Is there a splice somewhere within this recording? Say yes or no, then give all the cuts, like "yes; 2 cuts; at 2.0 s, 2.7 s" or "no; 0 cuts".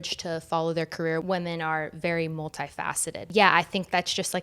yes; 2 cuts; at 1.2 s, 3.2 s